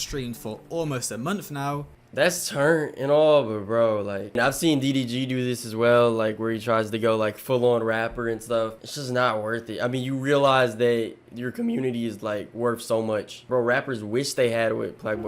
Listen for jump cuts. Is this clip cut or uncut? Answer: cut